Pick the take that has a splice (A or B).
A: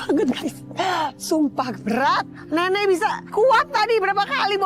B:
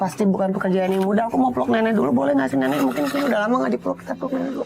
A